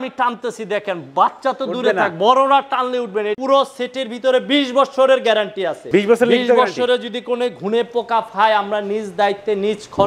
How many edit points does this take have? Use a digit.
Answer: 2